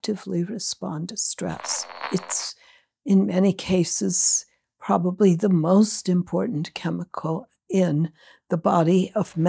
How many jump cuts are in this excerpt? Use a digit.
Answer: 1